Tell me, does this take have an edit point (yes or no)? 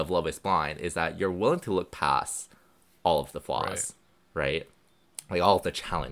no